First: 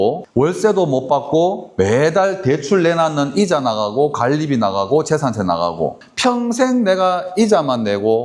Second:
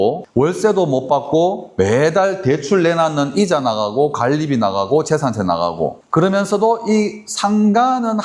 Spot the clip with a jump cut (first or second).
first